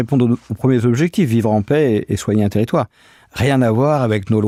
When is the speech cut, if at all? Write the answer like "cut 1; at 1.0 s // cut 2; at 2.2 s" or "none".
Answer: none